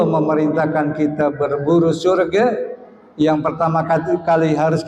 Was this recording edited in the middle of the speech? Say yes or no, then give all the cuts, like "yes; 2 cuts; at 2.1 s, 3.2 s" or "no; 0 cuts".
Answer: no; 0 cuts